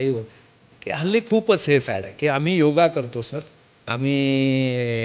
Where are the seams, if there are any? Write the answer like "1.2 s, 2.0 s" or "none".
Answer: 0.9 s